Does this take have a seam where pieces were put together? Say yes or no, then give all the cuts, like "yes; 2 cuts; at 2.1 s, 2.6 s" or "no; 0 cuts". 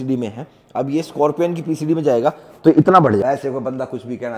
yes; 1 cut; at 3.2 s